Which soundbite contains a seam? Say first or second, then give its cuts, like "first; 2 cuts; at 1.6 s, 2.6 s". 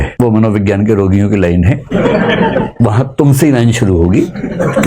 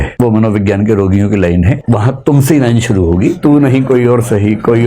second; 2 cuts; at 1.8 s, 3.4 s